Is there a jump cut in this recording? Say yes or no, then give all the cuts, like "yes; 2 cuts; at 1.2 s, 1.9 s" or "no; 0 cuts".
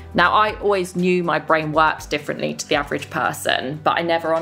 no; 0 cuts